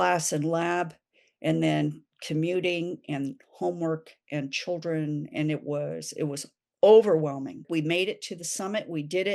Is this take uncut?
no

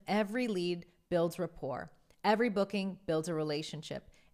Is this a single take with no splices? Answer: yes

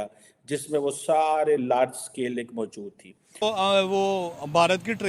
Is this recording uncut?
no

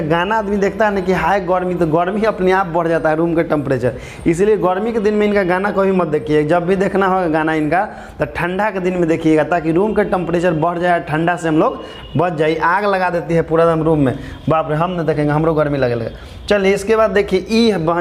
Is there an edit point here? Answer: no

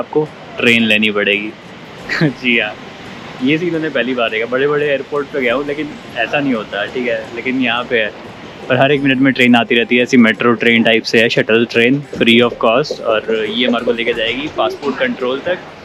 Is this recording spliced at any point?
no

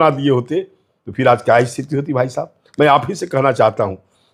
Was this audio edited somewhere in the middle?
no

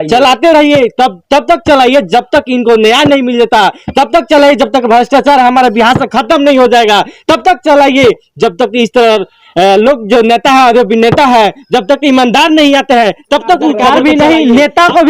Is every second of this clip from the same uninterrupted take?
no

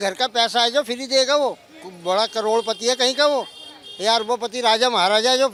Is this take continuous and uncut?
yes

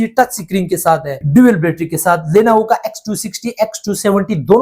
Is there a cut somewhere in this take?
yes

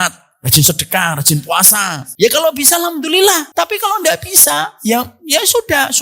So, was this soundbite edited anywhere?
yes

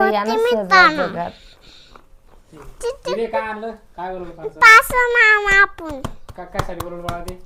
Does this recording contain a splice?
no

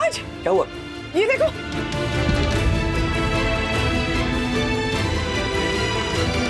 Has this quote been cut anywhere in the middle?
no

